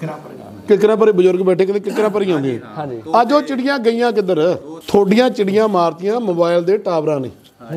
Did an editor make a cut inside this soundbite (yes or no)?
yes